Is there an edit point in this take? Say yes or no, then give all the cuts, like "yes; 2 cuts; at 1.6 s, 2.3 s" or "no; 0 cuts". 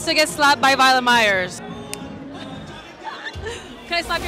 no; 0 cuts